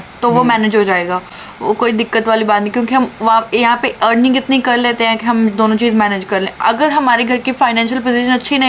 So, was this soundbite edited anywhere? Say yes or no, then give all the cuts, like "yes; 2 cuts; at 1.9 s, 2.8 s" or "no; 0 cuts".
no; 0 cuts